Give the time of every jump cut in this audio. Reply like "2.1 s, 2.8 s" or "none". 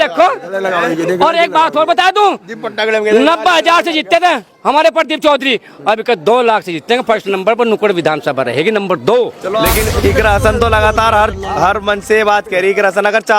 9.7 s